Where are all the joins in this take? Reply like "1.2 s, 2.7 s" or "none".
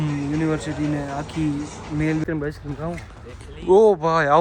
2.2 s

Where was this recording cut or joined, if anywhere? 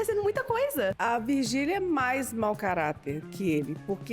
1.0 s

